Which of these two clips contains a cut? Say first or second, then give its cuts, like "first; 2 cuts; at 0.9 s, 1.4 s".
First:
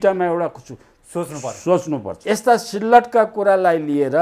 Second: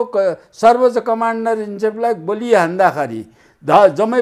first; 1 cut; at 2.1 s